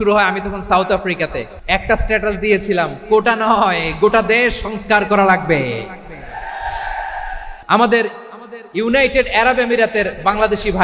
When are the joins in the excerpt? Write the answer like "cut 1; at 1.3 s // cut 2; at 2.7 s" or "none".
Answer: cut 1; at 1.5 s // cut 2; at 7.5 s